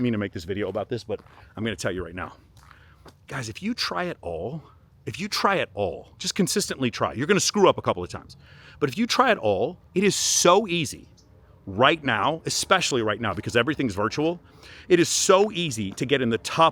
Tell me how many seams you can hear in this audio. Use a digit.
0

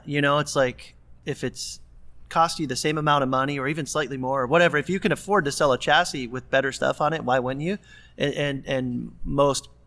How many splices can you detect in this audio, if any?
1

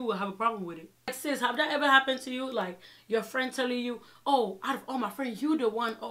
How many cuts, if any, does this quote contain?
1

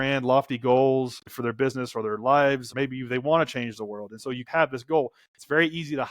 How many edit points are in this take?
2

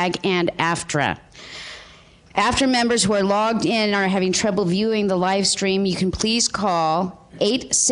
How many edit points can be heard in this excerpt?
1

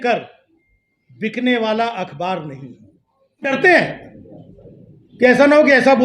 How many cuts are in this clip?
1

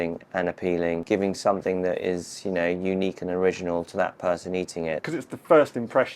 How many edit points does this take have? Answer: 2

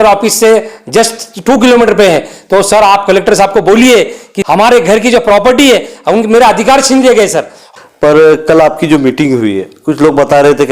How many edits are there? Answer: 2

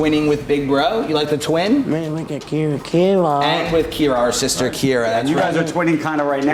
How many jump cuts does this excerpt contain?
0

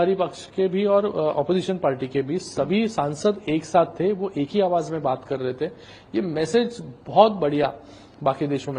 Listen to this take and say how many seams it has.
0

